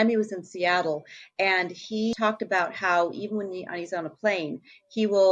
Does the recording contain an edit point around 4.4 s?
no; 1 cut; at 2.1 s

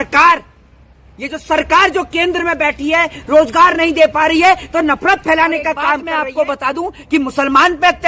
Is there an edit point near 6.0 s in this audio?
yes; 1 cut; at 6.0 s

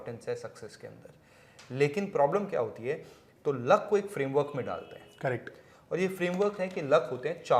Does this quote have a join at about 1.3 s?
no; 1 cut; at 3.2 s

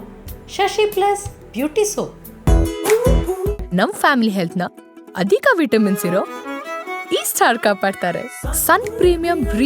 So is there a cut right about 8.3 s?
no; 1 cut; at 2.2 s

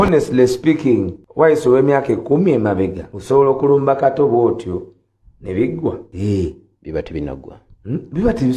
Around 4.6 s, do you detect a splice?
no; 4 cuts; at 1.2 s, 3.1 s, 6.1 s, 6.7 s

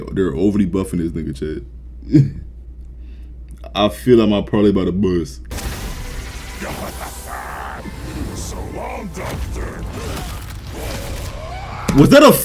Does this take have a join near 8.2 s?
no; 1 cut; at 5.5 s

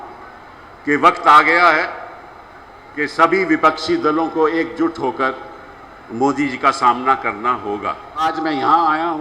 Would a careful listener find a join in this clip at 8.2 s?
yes; 1 cut; at 8.2 s

